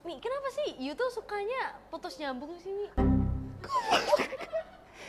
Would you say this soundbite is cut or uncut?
uncut